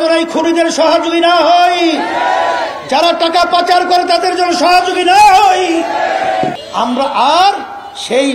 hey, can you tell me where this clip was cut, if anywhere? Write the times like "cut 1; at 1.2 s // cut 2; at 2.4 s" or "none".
cut 1; at 6.6 s